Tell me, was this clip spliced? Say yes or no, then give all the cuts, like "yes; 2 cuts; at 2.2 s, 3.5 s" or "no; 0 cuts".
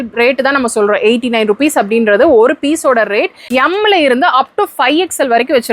yes; 1 cut; at 3.4 s